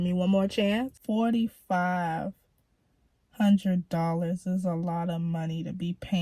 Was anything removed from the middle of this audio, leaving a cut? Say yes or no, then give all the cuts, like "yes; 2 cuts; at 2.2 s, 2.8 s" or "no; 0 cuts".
yes; 1 cut; at 1.0 s